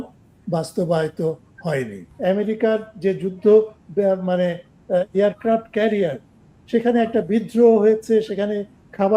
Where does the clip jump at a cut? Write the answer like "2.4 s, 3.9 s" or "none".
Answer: 2.1 s